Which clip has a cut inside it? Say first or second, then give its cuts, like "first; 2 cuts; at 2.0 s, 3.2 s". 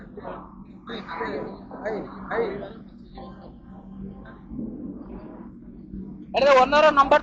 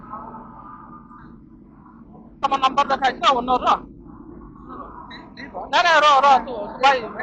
second; 1 cut; at 2.4 s